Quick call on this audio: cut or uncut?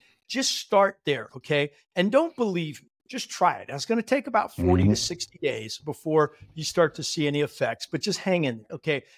uncut